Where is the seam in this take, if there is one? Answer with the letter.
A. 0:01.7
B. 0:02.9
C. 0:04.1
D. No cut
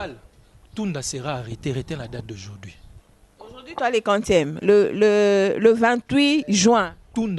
D